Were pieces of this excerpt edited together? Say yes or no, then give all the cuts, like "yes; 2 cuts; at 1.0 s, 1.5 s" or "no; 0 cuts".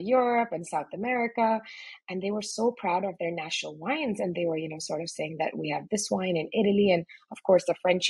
no; 0 cuts